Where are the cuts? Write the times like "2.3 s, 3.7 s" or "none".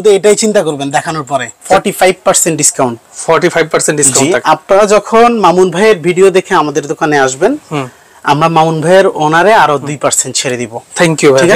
1.5 s